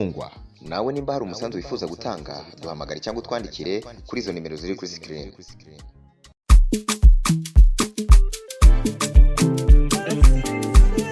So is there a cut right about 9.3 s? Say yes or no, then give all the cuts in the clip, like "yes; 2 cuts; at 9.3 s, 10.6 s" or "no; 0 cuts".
no; 0 cuts